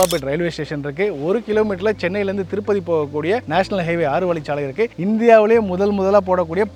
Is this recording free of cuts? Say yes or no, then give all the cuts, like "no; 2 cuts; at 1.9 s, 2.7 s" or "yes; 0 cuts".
yes; 0 cuts